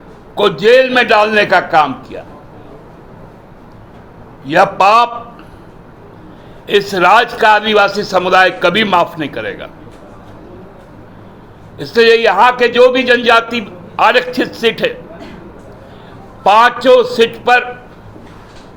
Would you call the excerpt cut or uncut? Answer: uncut